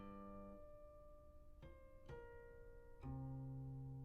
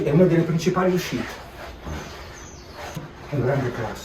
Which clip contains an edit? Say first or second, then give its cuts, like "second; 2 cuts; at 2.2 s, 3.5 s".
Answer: second; 1 cut; at 3.1 s